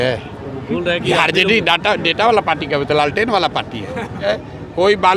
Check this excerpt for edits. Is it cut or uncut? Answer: cut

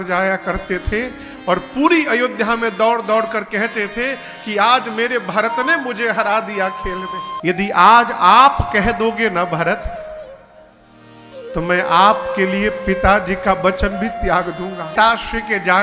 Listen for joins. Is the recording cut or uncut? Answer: cut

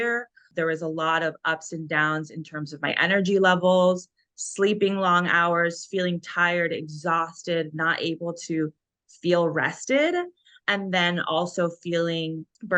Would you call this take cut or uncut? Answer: uncut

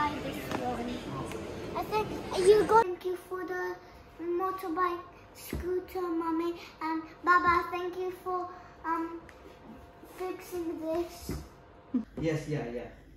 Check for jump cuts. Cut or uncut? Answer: cut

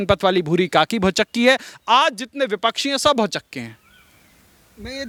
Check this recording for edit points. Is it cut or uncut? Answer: uncut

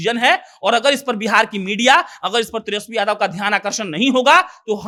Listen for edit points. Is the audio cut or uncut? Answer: uncut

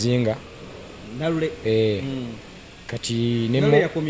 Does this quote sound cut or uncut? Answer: uncut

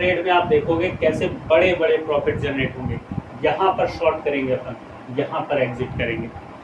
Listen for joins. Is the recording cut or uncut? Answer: uncut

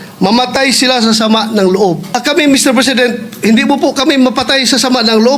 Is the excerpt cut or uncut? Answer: cut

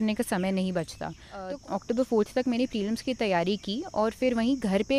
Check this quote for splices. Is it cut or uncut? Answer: cut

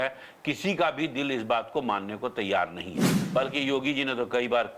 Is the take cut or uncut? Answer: cut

